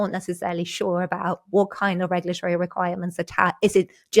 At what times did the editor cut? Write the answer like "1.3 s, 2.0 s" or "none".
none